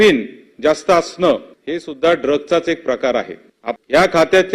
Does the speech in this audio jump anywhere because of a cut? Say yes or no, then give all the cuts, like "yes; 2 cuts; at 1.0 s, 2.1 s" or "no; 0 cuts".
yes; 1 cut; at 3.6 s